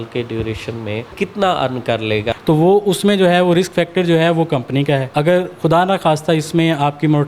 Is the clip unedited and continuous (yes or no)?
no